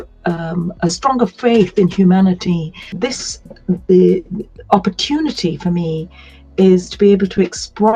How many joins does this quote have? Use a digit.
1